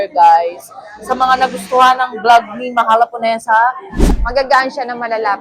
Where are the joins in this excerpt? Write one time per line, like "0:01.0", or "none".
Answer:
0:03.9